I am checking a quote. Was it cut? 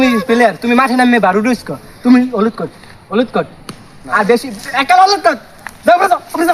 no; 0 cuts

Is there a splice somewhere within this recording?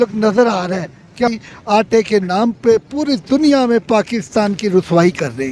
yes; 1 cut; at 1.2 s

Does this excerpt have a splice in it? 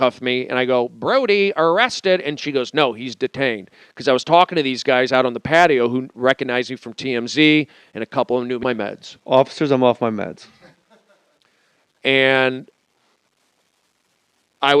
no; 0 cuts

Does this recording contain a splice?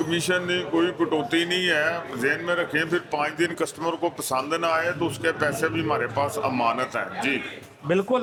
no; 0 cuts

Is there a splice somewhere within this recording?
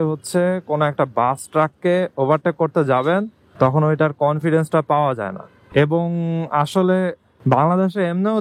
no; 0 cuts

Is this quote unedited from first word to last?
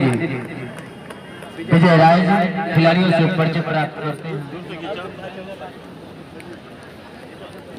no; 1 cut; at 4.1 s

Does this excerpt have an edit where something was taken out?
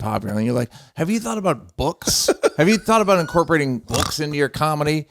yes; 1 cut; at 3.8 s

